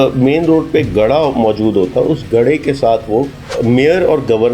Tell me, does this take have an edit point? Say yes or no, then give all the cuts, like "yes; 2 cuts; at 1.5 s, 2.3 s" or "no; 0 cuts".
yes; 1 cut; at 3.4 s